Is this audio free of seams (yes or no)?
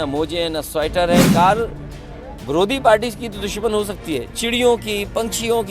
no